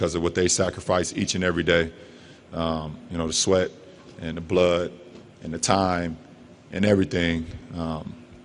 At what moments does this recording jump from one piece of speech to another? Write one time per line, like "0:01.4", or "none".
none